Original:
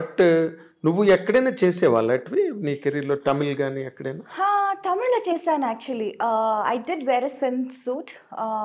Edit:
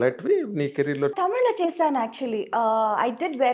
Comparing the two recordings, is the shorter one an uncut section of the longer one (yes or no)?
no